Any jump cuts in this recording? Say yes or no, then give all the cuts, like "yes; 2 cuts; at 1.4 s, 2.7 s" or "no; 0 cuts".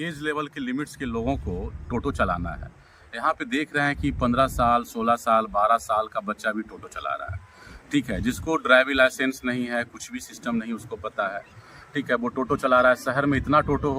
no; 0 cuts